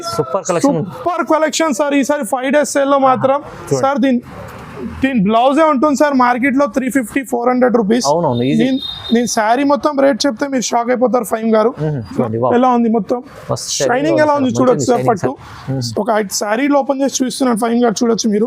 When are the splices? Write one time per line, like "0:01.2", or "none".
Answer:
0:12.1